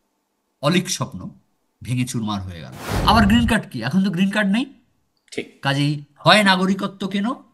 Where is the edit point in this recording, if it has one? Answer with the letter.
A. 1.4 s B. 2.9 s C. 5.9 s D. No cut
B